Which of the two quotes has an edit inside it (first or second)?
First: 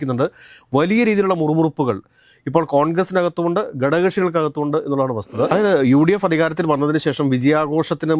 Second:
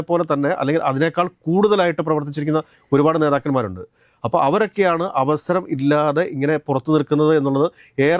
first